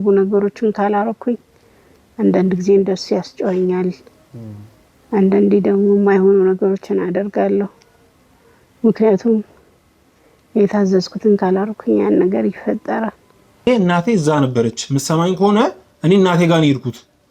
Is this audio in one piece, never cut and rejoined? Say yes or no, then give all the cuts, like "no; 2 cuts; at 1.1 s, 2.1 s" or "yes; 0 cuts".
no; 1 cut; at 13.7 s